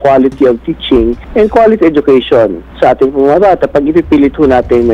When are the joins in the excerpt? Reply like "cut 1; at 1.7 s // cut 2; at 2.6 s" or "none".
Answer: cut 1; at 1.2 s // cut 2; at 2.6 s